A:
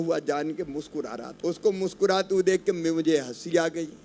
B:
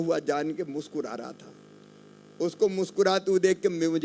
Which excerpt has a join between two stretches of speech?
A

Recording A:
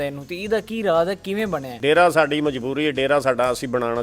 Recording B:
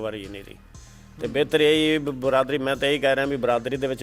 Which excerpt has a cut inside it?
A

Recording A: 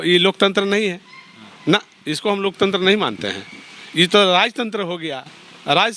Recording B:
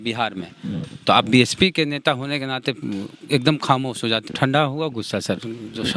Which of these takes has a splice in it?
B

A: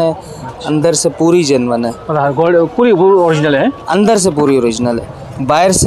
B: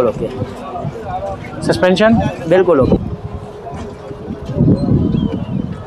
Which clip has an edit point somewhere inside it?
B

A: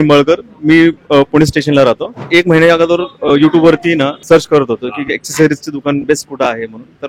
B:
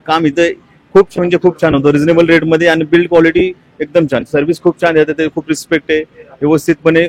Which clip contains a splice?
A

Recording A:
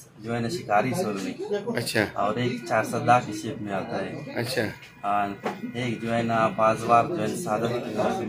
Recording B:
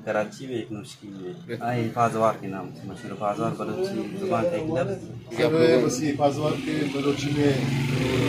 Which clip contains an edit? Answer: B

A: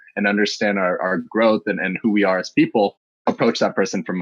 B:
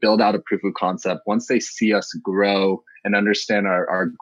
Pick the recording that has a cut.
A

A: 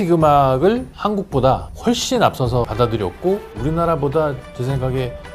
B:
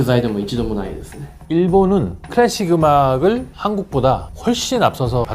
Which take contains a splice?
B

